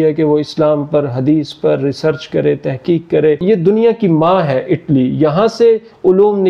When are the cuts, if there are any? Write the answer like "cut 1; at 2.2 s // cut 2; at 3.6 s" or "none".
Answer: cut 1; at 3.4 s

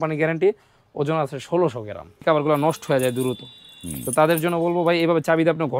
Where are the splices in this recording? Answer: cut 1; at 2.2 s

